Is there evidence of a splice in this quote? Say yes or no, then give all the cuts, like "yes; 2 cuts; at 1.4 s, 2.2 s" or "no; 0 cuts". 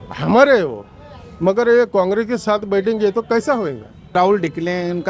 yes; 1 cut; at 4.1 s